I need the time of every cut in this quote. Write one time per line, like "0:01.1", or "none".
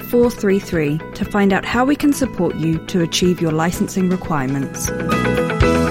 0:04.9